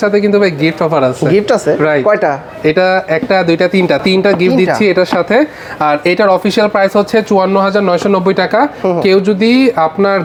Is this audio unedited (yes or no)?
yes